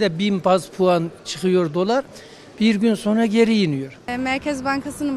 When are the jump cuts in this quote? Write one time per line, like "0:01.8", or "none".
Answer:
0:04.1